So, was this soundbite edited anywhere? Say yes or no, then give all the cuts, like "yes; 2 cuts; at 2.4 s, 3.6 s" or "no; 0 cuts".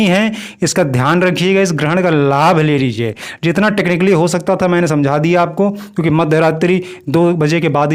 no; 0 cuts